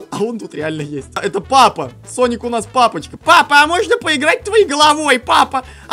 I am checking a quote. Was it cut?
yes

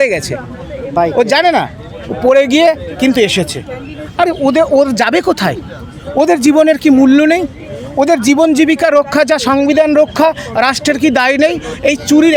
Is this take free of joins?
yes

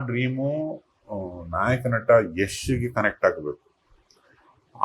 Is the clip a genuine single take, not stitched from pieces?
yes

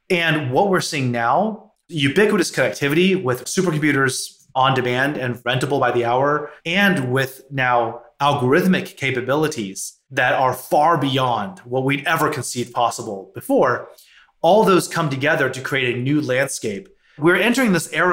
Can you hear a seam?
yes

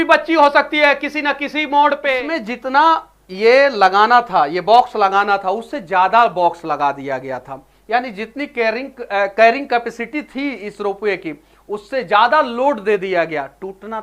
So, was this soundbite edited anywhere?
yes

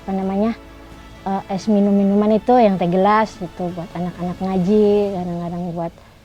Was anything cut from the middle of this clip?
no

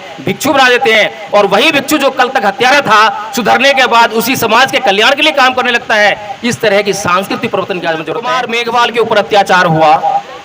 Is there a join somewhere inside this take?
yes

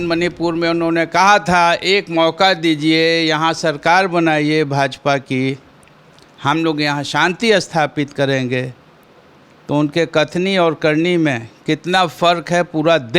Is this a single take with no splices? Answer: yes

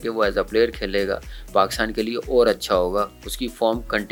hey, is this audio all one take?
yes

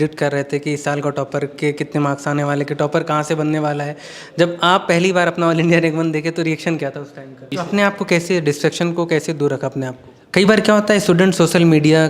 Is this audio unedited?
no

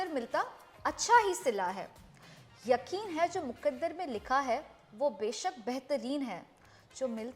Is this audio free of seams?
yes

